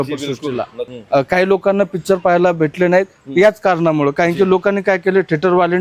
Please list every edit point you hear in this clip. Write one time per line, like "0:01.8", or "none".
0:00.9